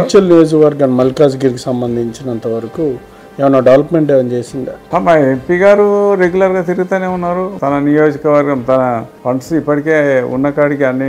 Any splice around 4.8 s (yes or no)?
yes